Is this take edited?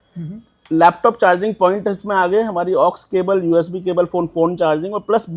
no; 0 cuts

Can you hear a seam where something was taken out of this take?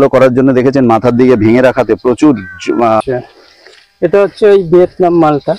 yes; 1 cut; at 3.0 s

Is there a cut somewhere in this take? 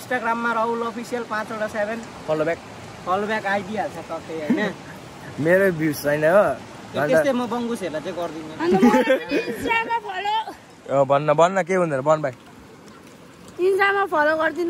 no; 0 cuts

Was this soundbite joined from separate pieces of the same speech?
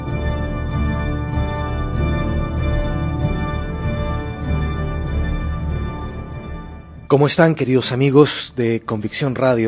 yes; 1 cut; at 1.2 s

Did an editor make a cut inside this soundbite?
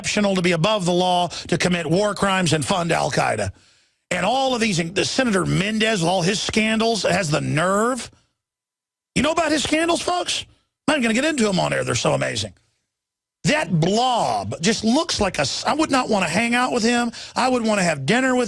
no; 0 cuts

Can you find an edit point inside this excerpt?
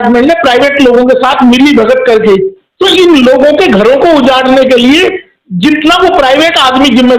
yes; 1 cut; at 2.6 s

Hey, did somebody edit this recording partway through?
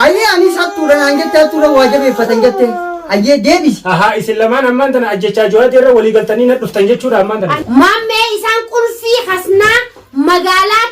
yes; 1 cut; at 7.5 s

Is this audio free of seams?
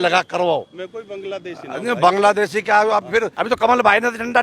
no; 1 cut; at 3.4 s

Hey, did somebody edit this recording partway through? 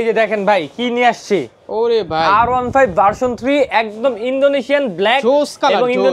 no; 0 cuts

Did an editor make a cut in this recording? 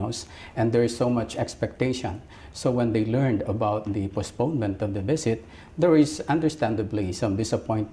yes; 1 cut; at 5.0 s

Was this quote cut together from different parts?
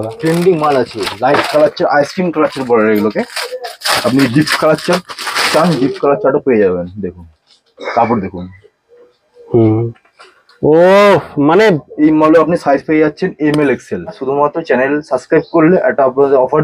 no; 0 cuts

